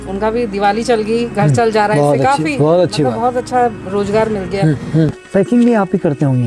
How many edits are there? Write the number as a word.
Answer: one